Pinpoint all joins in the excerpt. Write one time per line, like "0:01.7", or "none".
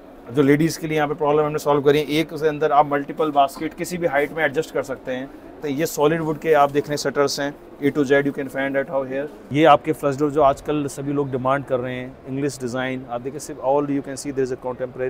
0:05.5
0:09.4

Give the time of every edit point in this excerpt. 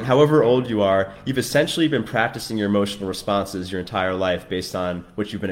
none

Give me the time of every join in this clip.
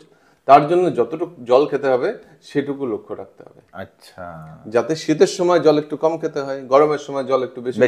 none

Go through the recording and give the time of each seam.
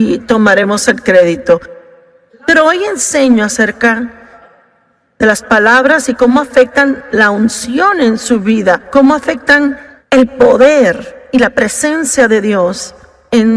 0:09.9

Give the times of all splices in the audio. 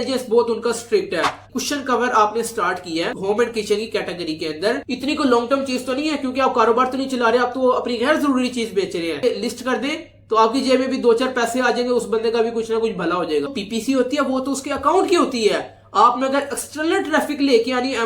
0:01.5
0:04.9
0:09.2
0:13.5

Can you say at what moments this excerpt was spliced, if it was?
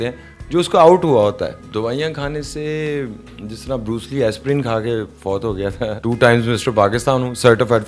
0:01.6
0:06.0

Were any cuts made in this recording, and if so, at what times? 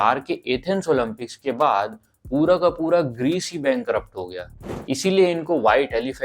0:04.5

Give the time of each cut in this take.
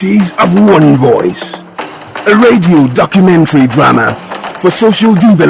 none

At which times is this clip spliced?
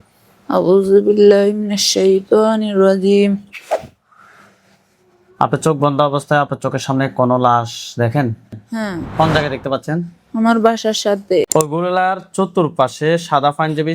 0:11.5

